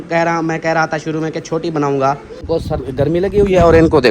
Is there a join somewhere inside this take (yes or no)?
yes